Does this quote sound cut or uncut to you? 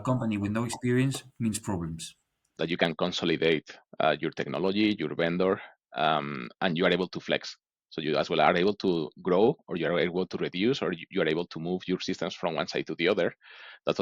cut